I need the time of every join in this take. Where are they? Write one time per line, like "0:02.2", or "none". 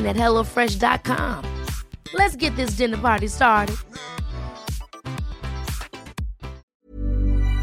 0:06.7